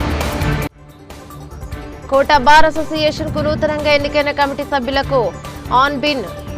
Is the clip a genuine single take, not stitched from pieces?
yes; 0 cuts

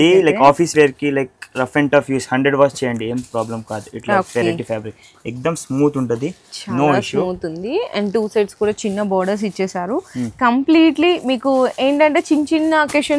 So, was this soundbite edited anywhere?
no; 0 cuts

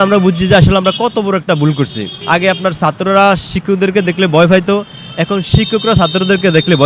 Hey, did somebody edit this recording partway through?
yes; 1 cut; at 2.2 s

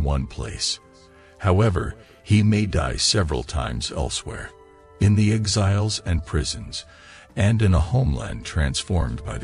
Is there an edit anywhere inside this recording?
no; 0 cuts

